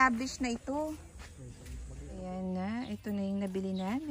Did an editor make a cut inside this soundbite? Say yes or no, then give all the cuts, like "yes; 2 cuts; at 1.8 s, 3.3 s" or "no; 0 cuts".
yes; 1 cut; at 1.7 s